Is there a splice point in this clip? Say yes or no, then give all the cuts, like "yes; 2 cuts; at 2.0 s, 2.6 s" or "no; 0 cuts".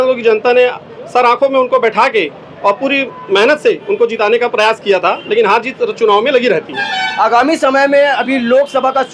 no; 0 cuts